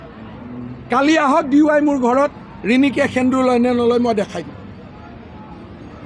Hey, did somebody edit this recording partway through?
no; 0 cuts

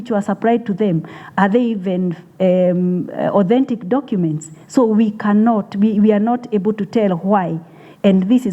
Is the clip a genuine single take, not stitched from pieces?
yes; 0 cuts

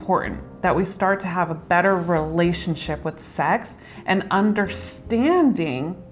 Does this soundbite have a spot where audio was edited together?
no; 0 cuts

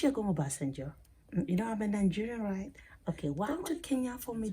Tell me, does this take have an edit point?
yes; 1 cut; at 3.5 s

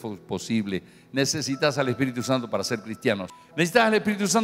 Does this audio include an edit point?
no; 0 cuts

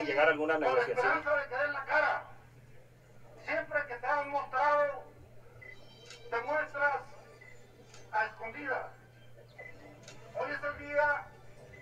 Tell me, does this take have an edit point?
no; 0 cuts

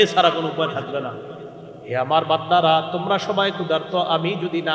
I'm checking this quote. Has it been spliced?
yes; 1 cut; at 1.3 s

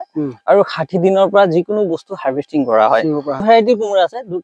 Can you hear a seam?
yes; 1 cut; at 3.4 s

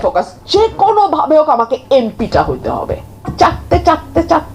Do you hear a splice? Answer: yes; 1 cut; at 3.3 s

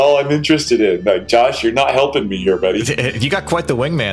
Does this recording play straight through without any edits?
no; 1 cut; at 2.9 s

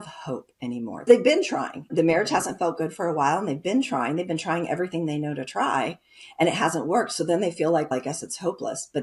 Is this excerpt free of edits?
no; 2 cuts; at 1.1 s, 1.9 s

